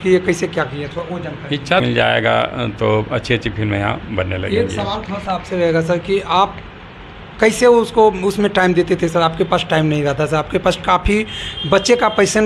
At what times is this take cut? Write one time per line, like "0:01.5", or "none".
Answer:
0:01.8